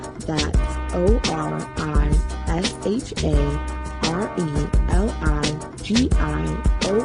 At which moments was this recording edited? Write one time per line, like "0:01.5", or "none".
0:01.0